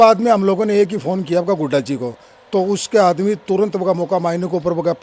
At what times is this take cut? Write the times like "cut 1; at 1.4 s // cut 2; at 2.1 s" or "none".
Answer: none